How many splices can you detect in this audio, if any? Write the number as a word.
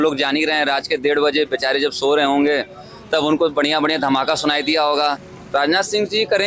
one